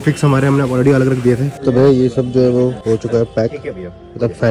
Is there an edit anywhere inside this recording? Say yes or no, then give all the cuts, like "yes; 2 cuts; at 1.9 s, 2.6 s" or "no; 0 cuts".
yes; 2 cuts; at 1.6 s, 2.8 s